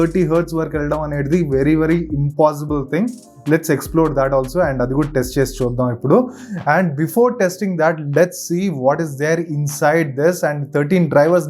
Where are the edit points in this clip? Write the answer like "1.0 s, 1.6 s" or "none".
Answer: none